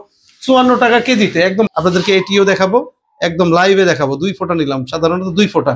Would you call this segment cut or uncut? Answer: cut